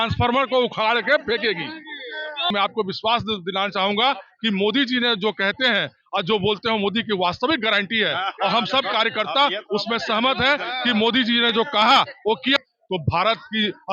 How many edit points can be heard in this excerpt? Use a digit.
2